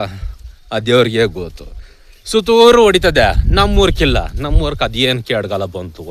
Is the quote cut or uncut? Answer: uncut